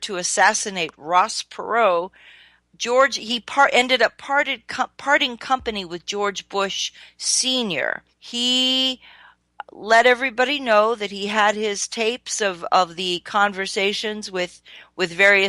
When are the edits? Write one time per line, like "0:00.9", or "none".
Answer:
0:11.8